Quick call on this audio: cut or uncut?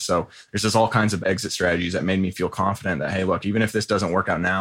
cut